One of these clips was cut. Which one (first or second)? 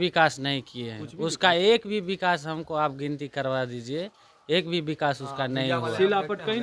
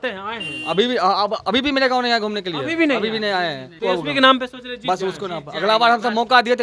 second